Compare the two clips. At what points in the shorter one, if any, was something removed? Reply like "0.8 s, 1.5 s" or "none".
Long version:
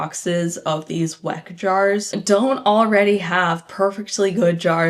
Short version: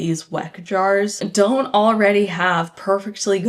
none